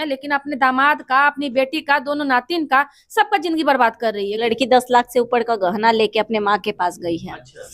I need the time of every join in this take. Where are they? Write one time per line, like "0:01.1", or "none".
0:04.4